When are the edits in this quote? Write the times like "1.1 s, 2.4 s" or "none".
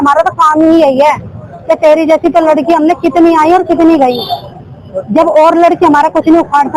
none